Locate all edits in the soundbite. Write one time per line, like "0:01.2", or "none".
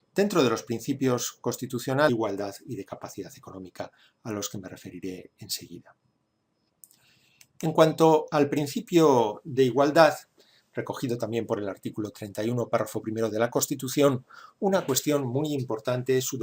none